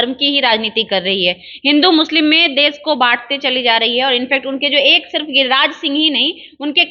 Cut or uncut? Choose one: uncut